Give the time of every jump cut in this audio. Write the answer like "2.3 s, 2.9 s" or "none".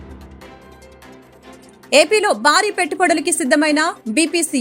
none